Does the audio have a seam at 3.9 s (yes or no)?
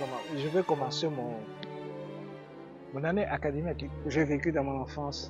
yes